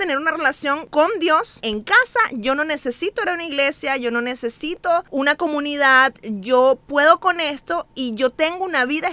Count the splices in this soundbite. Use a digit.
2